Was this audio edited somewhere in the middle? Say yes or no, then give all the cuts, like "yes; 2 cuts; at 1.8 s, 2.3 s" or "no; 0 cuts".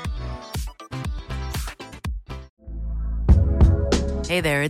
yes; 1 cut; at 2.5 s